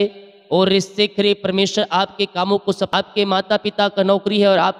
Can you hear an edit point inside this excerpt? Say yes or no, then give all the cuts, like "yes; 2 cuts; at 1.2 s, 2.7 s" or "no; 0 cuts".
yes; 1 cut; at 2.9 s